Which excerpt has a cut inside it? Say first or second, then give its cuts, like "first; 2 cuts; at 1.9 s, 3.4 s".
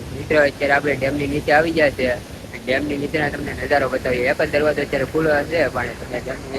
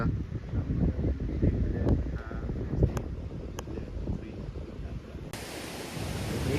second; 1 cut; at 5.3 s